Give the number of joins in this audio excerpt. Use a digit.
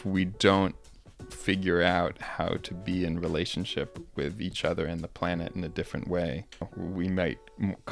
1